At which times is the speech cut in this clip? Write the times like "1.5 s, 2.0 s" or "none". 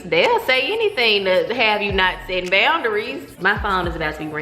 3.3 s